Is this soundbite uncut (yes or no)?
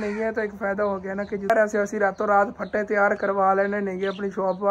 no